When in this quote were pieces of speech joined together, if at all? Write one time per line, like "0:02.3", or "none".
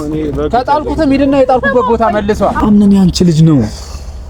0:02.6